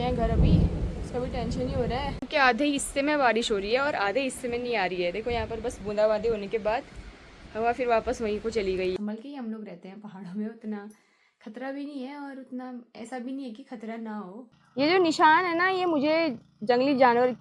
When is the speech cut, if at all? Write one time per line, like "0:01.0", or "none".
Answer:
0:02.2
0:08.9
0:14.6